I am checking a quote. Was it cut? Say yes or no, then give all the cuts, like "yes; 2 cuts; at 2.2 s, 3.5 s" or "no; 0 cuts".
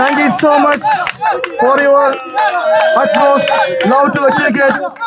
no; 0 cuts